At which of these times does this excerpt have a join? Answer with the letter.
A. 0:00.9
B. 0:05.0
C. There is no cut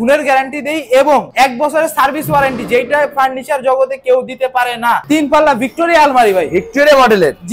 B